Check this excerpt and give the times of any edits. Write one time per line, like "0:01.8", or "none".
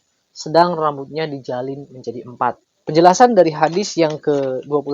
0:02.7